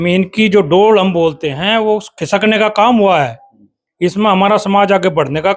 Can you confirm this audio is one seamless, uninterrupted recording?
yes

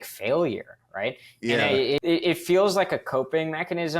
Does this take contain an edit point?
yes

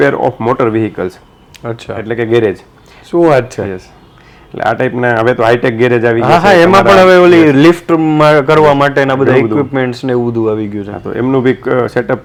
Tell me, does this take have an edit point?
no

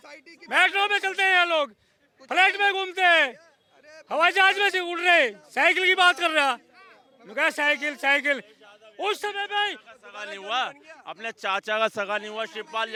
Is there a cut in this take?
no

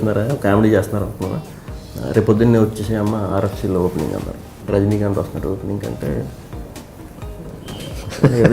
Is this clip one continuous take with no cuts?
no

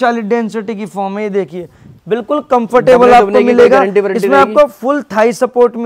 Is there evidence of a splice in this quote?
no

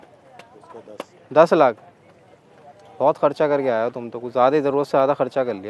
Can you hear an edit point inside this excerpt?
no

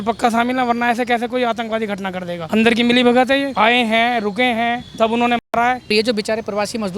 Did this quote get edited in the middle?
yes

